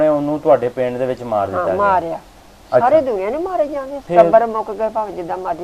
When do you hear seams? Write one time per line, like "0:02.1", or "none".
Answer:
0:04.0